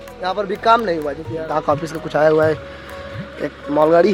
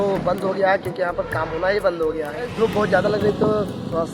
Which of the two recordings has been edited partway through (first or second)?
second